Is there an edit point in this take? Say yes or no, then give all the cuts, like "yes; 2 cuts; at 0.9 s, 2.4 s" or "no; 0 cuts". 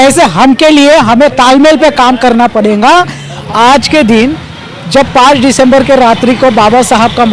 yes; 1 cut; at 3.4 s